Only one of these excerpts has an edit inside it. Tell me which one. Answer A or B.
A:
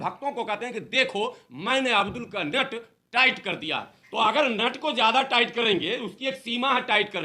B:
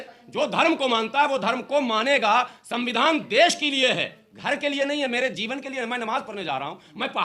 A